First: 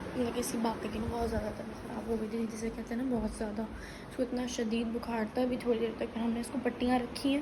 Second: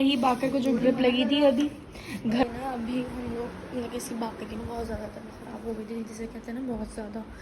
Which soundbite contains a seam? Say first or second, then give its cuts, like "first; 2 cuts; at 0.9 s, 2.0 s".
second; 1 cut; at 2.4 s